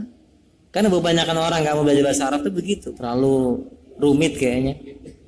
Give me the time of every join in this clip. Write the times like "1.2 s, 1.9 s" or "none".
2.9 s